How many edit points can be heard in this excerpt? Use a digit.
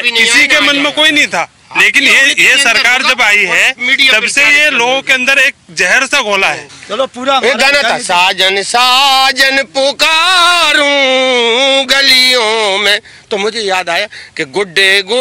1